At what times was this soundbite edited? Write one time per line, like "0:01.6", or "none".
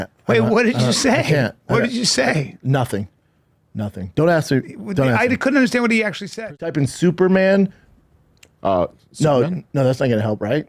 0:06.3